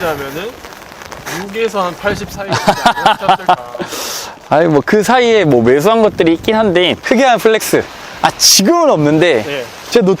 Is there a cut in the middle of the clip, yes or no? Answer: yes